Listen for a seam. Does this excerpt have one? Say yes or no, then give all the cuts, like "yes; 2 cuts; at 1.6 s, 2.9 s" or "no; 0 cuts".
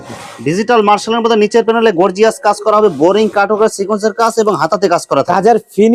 no; 0 cuts